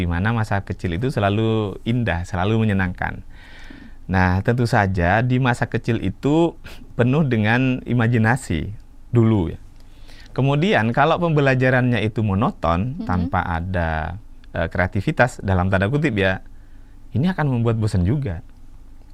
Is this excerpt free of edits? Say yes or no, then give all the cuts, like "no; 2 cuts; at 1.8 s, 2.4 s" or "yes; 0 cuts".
yes; 0 cuts